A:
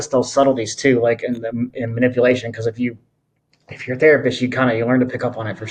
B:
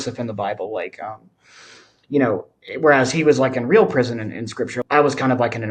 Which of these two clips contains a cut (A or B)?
B